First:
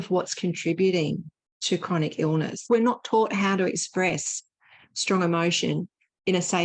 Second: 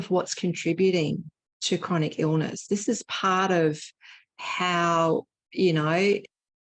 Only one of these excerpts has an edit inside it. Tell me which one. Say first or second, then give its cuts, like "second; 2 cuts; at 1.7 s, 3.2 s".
first; 1 cut; at 2.6 s